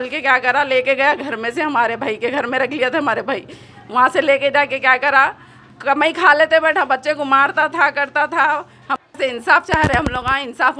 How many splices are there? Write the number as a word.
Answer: one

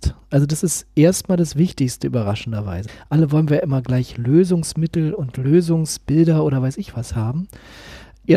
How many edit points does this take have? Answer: zero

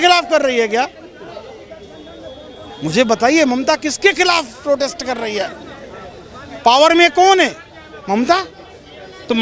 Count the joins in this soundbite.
zero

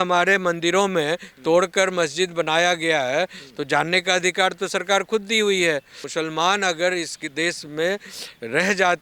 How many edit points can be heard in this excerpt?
one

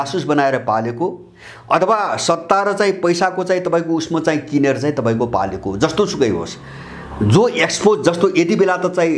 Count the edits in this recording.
zero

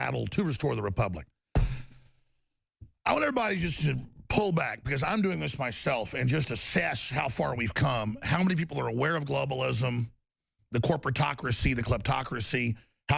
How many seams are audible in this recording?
one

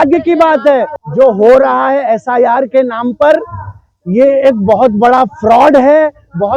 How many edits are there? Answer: one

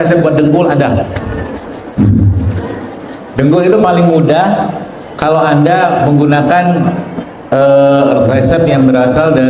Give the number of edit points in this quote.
zero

